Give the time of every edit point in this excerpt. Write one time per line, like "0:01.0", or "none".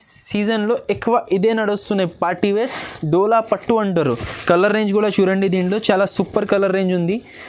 none